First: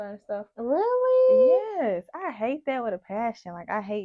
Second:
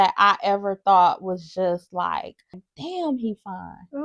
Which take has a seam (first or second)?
second